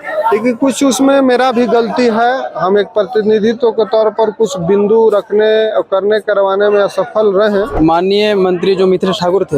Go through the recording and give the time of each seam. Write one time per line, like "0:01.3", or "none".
0:07.7